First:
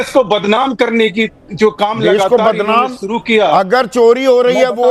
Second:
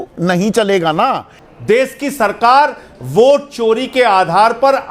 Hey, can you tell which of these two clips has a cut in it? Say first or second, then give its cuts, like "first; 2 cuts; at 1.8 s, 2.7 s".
second; 1 cut; at 1.4 s